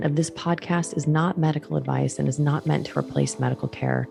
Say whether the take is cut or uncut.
uncut